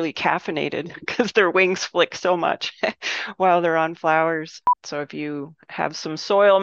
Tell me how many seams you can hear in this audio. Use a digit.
1